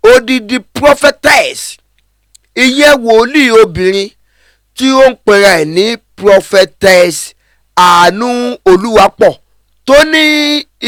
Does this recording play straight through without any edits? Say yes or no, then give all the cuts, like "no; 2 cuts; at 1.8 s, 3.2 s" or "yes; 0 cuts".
yes; 0 cuts